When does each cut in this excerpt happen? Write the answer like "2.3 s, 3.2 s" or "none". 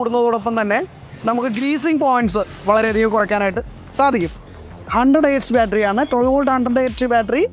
4.4 s